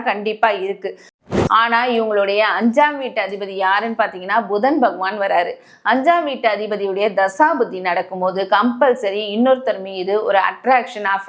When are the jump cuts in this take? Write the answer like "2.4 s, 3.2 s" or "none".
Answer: 1.2 s